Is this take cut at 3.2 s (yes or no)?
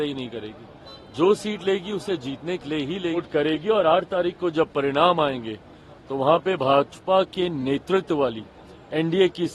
yes